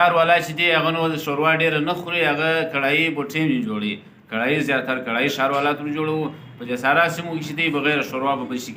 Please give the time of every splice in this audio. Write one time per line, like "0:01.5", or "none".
none